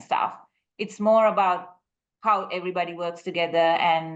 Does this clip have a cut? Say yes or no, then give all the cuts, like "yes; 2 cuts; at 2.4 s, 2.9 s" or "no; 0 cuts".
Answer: no; 0 cuts